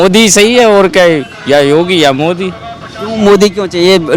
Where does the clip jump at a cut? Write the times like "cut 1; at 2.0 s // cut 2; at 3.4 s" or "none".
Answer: none